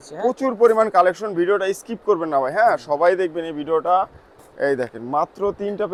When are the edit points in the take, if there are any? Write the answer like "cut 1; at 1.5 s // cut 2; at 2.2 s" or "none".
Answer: none